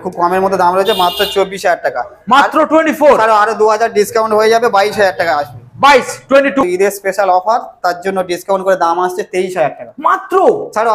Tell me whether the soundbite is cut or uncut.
cut